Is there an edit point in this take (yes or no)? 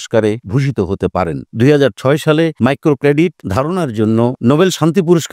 yes